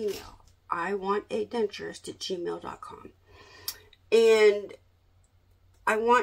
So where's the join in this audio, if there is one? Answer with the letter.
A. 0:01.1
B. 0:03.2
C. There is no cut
C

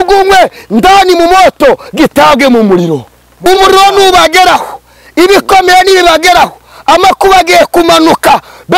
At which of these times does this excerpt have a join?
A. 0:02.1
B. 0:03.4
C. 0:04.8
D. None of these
B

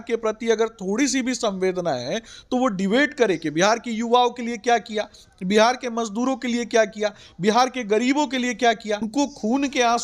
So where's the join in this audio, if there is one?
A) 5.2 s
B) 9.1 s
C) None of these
B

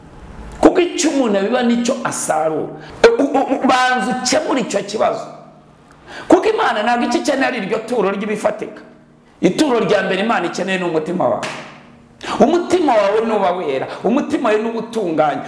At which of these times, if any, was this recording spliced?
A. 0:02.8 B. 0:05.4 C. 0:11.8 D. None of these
A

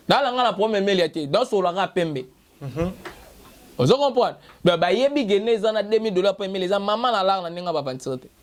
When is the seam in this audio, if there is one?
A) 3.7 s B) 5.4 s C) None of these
C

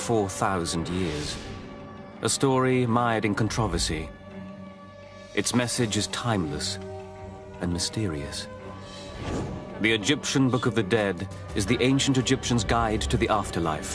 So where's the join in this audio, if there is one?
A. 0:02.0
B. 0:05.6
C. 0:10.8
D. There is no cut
D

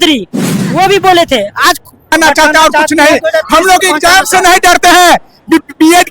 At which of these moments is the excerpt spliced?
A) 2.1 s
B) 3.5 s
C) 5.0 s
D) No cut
A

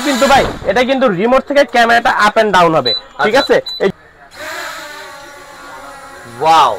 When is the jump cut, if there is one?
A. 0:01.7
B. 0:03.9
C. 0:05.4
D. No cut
B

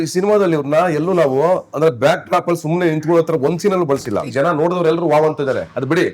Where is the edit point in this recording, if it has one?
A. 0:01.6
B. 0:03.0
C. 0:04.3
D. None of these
C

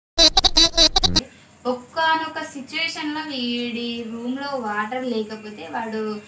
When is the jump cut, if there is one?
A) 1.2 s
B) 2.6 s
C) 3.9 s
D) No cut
A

